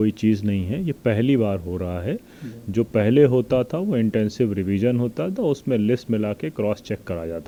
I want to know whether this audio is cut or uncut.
uncut